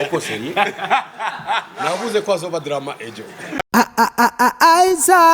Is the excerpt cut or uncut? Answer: cut